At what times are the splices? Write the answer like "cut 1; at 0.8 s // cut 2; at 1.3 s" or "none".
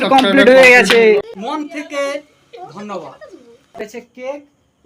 cut 1; at 1.5 s // cut 2; at 3.8 s